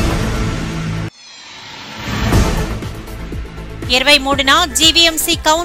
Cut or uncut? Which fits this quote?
cut